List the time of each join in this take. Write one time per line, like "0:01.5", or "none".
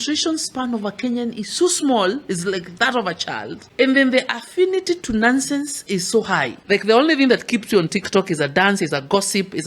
0:03.6
0:06.6